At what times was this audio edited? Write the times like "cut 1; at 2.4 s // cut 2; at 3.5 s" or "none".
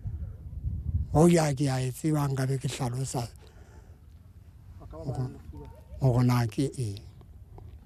none